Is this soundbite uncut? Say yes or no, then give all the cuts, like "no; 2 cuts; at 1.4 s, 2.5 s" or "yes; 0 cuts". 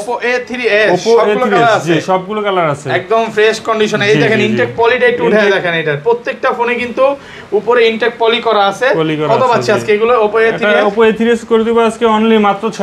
yes; 0 cuts